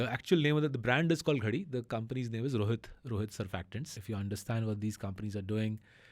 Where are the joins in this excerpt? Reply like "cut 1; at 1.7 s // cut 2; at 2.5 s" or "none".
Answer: cut 1; at 4.0 s